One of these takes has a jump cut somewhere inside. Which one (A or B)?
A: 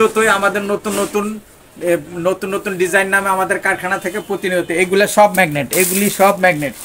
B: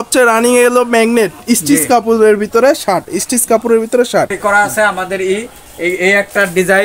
B